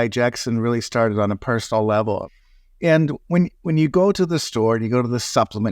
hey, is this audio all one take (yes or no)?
no